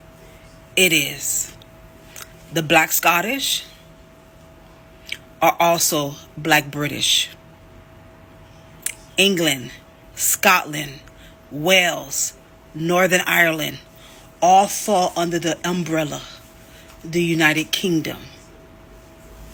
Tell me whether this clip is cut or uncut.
uncut